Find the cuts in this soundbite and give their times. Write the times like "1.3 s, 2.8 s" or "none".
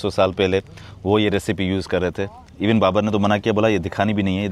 none

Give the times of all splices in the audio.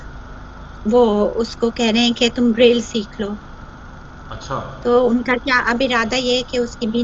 none

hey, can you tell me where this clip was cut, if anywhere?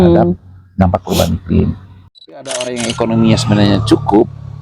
2.1 s

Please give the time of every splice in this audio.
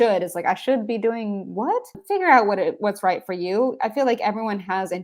2.0 s

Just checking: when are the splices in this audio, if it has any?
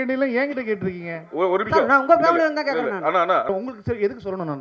3.5 s

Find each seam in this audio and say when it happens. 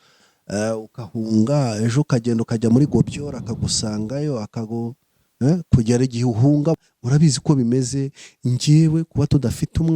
6.8 s

